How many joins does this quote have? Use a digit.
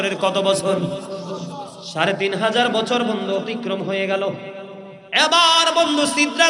0